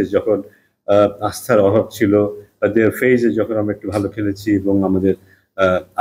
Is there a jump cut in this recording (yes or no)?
no